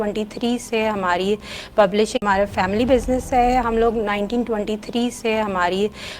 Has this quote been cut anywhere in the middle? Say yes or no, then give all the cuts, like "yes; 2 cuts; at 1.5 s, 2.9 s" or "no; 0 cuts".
yes; 1 cut; at 2.2 s